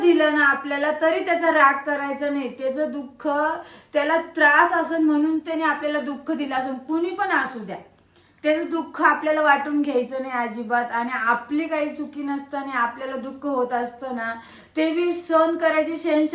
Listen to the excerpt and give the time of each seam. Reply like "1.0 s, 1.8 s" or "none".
none